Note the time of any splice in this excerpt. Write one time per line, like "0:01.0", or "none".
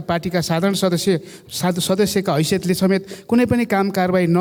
none